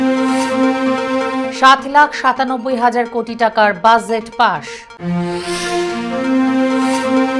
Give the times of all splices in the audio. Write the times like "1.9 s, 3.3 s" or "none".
1.4 s